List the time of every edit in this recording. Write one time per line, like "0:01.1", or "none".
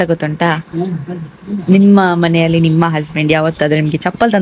none